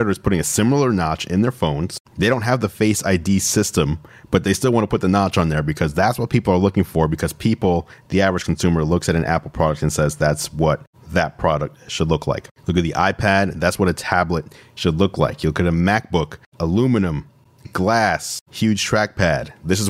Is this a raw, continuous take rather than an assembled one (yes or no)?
yes